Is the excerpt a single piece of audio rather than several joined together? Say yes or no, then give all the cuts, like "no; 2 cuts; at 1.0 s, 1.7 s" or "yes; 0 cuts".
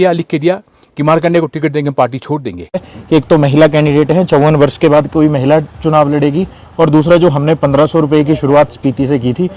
no; 1 cut; at 2.9 s